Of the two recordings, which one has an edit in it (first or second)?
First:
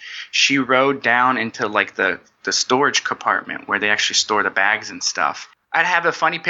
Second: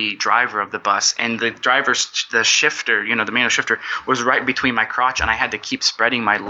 first